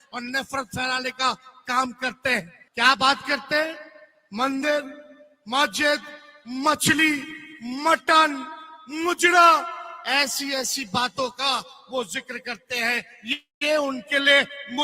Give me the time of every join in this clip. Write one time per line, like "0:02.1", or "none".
0:02.6